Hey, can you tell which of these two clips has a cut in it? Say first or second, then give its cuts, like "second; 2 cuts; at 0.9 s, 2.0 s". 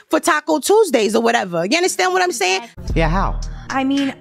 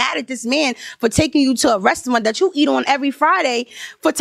first; 1 cut; at 2.7 s